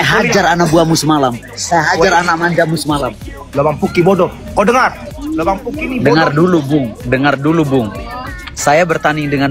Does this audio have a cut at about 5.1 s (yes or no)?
yes